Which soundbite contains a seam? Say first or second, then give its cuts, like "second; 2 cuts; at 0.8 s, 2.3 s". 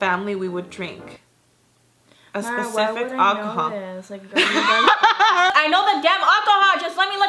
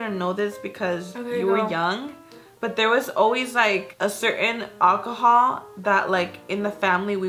first; 1 cut; at 5.5 s